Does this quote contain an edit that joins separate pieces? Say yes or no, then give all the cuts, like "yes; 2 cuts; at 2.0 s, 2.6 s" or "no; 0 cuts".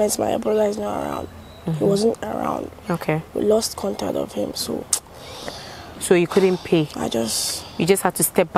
no; 0 cuts